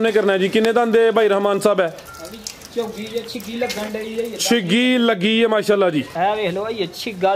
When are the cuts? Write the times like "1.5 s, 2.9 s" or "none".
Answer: 6.1 s

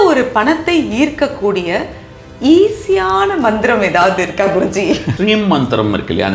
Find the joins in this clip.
5.1 s

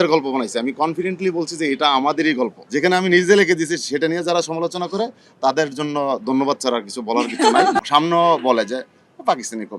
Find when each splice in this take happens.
2.6 s, 7.9 s

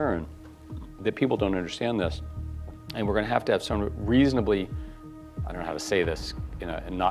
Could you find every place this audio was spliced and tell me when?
2.4 s

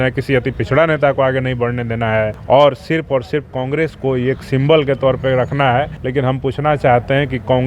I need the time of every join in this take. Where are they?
2.4 s, 6.0 s

